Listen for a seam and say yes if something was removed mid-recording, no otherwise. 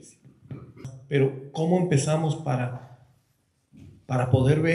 yes